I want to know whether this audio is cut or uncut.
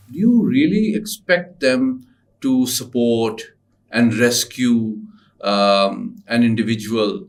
uncut